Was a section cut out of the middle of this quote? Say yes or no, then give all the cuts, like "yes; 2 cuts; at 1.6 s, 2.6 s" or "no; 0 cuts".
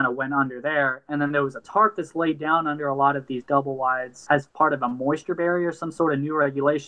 yes; 2 cuts; at 1.6 s, 4.3 s